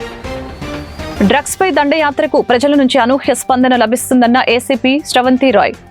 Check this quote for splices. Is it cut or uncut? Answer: cut